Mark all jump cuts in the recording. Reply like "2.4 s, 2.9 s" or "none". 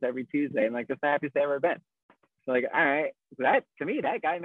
none